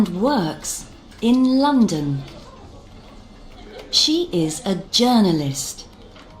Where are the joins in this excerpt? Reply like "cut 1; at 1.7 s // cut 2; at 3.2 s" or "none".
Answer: cut 1; at 5.4 s